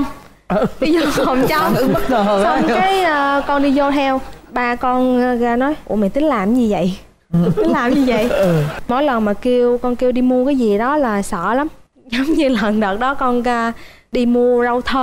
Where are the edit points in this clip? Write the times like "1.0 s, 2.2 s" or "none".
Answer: 8.8 s, 14.0 s